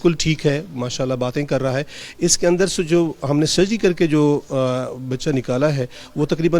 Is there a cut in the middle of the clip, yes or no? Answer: no